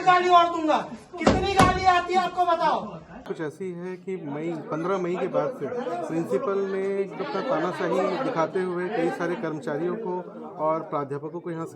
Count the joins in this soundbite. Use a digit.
1